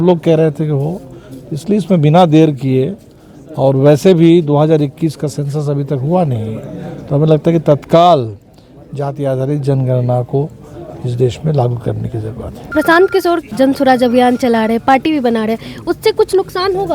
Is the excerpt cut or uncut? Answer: cut